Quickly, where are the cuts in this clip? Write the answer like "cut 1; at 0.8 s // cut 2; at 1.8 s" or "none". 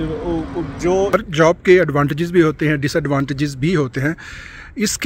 cut 1; at 1.1 s